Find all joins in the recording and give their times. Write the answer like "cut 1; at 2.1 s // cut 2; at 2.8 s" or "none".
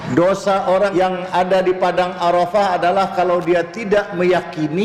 cut 1; at 0.9 s